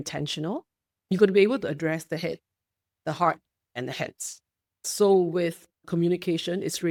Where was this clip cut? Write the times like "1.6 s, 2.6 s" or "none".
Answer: none